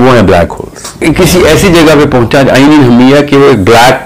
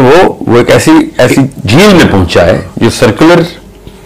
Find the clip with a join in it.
first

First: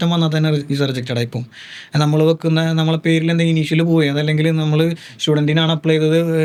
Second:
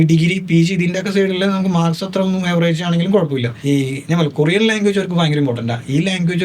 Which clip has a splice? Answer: second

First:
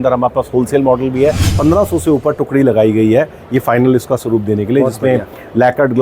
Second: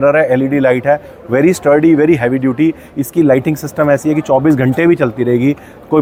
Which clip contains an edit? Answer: first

